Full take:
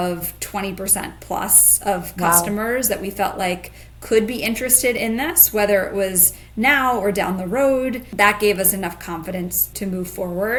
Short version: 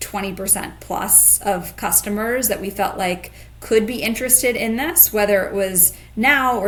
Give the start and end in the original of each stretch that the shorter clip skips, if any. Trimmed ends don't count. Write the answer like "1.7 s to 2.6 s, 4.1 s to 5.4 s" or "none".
none